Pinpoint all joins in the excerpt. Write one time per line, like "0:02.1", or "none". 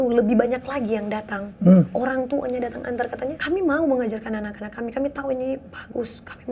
0:03.4